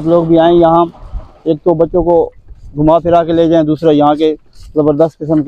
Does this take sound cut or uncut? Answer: uncut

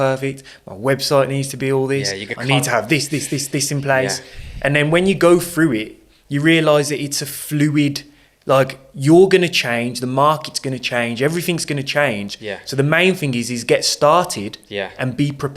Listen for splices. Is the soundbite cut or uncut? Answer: uncut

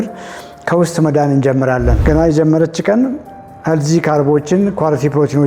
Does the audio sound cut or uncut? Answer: cut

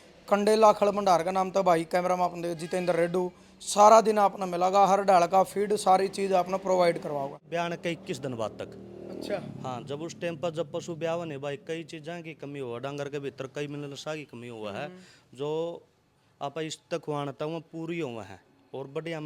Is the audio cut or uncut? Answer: cut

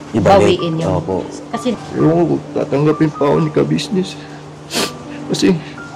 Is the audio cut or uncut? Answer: cut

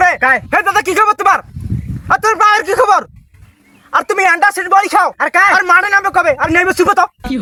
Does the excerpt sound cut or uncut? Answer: uncut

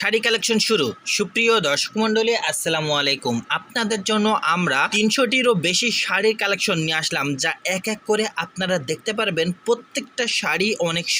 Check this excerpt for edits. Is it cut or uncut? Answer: cut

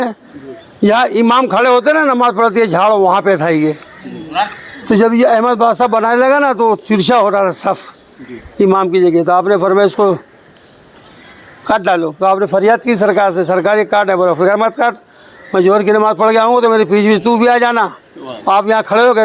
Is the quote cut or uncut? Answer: uncut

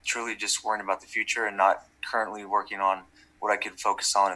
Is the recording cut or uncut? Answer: uncut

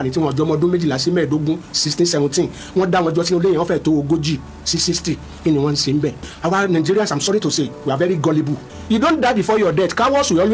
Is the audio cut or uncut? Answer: cut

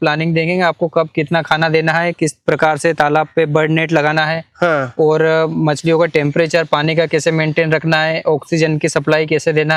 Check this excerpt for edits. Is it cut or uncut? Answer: uncut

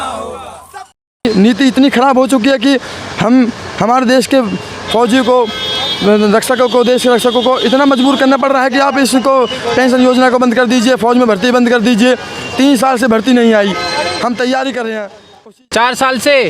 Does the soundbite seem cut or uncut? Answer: cut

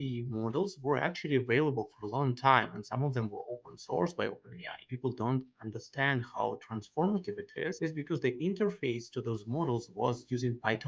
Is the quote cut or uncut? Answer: cut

